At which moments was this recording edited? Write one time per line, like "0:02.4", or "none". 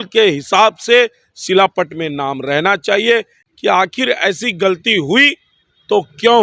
0:03.4